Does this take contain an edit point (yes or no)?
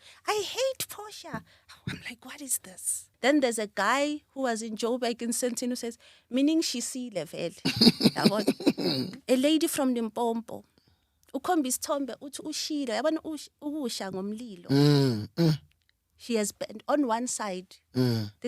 yes